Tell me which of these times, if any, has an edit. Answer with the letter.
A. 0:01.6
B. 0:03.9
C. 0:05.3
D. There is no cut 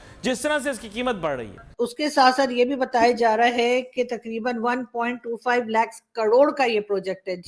A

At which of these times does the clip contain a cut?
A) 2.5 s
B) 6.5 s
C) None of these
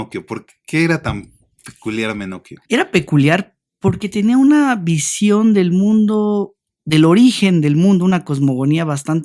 A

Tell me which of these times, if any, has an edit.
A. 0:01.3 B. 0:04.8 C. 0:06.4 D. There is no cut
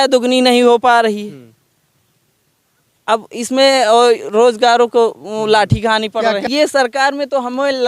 C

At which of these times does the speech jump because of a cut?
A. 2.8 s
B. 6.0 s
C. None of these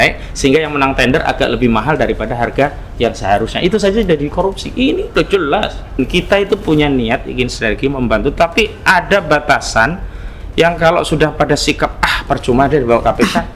B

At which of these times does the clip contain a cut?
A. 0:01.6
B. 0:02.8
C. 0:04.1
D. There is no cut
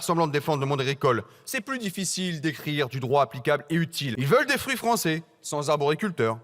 C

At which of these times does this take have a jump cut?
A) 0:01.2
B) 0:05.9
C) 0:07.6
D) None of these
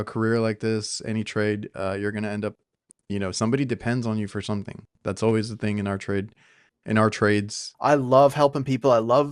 C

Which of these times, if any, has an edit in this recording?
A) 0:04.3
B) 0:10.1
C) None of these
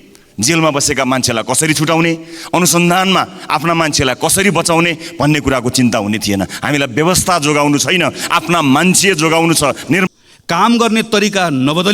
B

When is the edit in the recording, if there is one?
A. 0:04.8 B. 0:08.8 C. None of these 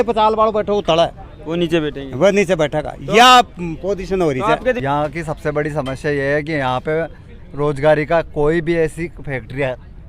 A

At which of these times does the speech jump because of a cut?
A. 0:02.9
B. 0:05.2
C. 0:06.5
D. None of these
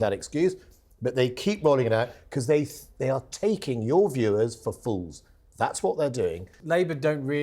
C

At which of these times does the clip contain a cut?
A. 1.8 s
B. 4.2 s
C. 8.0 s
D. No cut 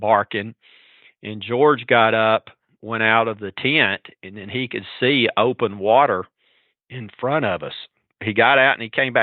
C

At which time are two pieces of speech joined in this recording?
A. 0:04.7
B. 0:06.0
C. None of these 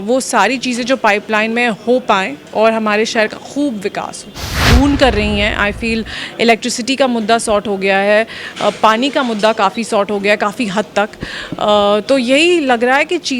A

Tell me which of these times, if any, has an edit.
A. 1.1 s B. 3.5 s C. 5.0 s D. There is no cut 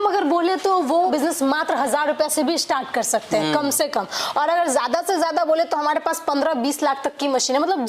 A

